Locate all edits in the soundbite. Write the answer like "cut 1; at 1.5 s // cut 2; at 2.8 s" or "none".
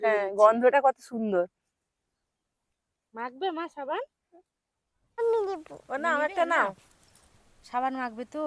none